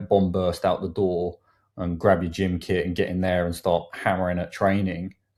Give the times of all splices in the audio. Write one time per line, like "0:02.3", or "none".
none